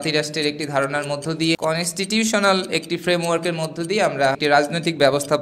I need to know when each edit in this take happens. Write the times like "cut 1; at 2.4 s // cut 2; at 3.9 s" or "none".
cut 1; at 1.6 s // cut 2; at 4.4 s